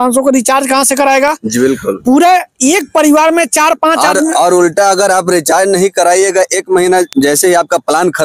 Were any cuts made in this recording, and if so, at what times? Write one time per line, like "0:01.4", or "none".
none